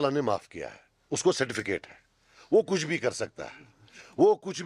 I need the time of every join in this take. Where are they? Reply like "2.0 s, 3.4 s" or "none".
none

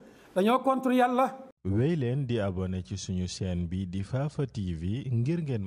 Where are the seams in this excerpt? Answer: 1.5 s

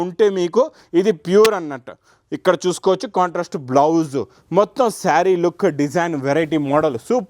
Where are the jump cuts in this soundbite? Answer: none

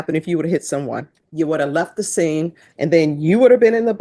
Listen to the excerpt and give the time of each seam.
1.2 s, 2.6 s

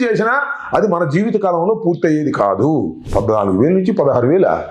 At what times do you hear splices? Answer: 3.1 s

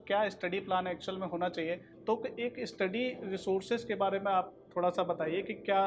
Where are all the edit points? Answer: 1.9 s

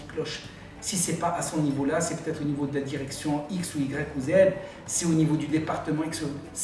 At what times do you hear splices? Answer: none

